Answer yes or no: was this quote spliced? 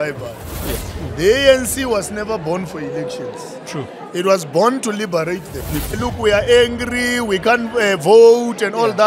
yes